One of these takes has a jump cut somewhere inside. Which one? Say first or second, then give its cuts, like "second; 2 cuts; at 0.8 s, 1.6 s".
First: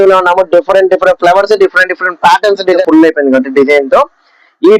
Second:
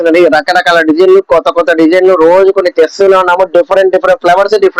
first; 1 cut; at 2.8 s